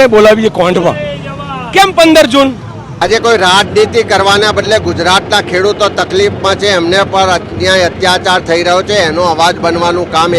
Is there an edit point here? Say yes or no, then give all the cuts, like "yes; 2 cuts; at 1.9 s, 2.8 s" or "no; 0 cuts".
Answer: yes; 1 cut; at 3.0 s